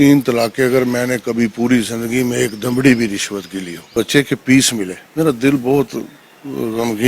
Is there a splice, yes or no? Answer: yes